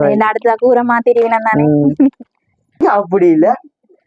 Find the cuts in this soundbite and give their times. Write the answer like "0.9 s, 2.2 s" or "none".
2.8 s

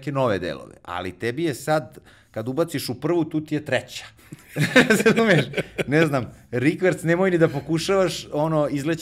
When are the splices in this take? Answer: none

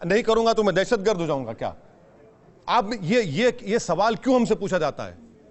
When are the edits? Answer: none

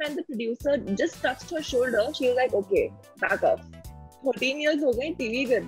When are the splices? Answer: 4.2 s

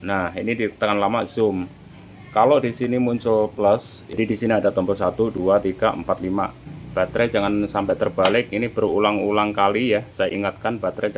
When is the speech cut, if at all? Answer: 4.1 s, 6.6 s

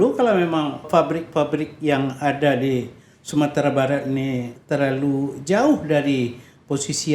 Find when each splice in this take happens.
0.8 s, 4.5 s

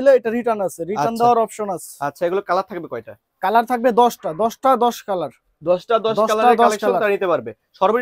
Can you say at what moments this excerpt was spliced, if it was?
none

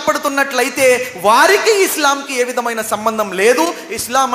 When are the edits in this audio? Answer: none

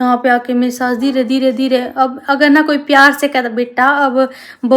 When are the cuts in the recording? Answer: none

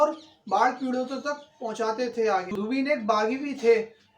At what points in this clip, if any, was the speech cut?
2.5 s

